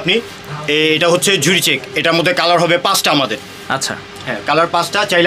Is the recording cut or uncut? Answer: uncut